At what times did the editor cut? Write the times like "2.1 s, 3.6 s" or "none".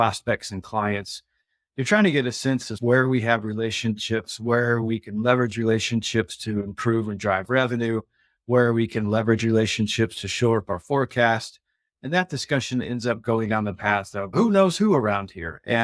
14.3 s